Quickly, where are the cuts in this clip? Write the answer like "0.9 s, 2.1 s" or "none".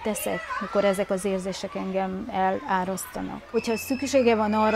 3.5 s